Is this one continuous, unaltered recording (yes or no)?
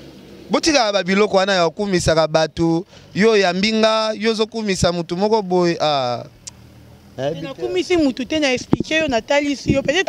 yes